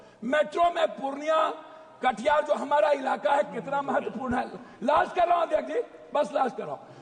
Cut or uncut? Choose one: uncut